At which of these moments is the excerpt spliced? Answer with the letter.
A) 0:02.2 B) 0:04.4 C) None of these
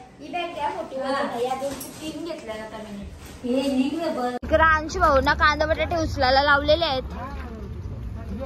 B